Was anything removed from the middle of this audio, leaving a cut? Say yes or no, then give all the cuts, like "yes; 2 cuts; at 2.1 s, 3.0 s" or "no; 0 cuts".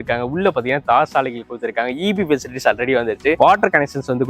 yes; 1 cut; at 3.4 s